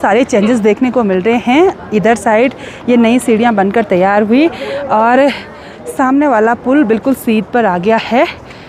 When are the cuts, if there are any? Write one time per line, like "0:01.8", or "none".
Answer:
none